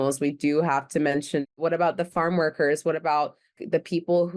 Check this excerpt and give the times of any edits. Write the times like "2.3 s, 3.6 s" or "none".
1.5 s, 3.5 s